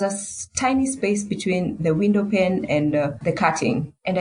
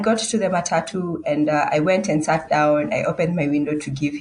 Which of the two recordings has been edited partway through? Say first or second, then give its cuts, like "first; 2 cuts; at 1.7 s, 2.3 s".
first; 1 cut; at 3.2 s